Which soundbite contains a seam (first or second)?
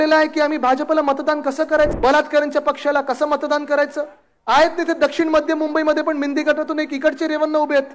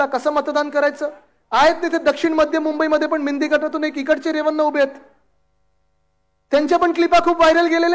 first